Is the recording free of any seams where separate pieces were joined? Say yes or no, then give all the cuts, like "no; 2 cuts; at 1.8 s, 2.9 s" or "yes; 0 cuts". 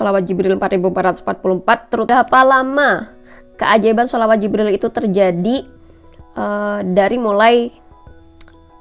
no; 1 cut; at 2.1 s